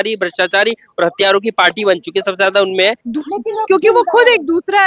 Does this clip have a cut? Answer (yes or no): yes